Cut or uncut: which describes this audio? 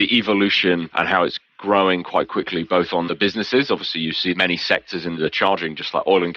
cut